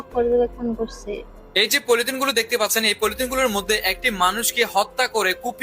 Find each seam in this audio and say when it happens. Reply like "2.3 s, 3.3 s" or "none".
1.5 s